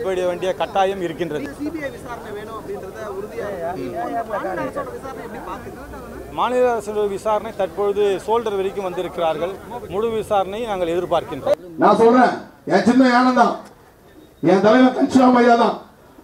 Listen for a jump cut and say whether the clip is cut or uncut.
cut